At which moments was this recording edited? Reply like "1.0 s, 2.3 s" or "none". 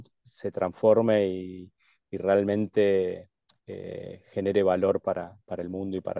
none

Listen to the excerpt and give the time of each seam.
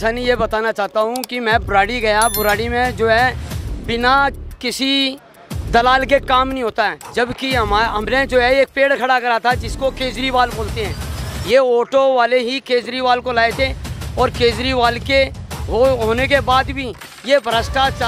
none

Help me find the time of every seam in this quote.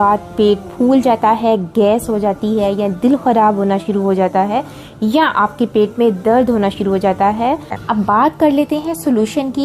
7.8 s

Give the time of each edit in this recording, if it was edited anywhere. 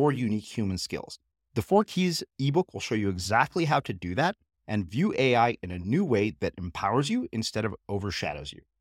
none

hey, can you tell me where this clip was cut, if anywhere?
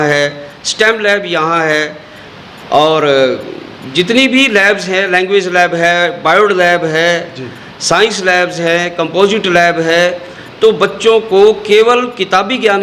none

